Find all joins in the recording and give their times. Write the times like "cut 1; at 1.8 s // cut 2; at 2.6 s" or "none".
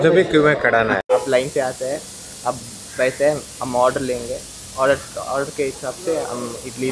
cut 1; at 1.0 s